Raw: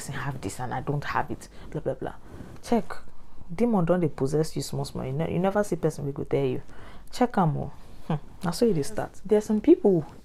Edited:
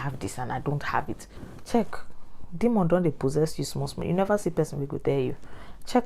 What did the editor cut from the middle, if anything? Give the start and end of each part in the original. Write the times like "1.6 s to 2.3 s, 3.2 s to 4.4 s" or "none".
1.5 s to 2.3 s, 5.0 s to 5.3 s